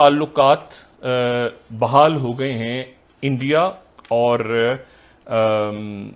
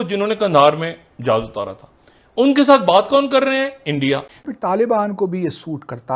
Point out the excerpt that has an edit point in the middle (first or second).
second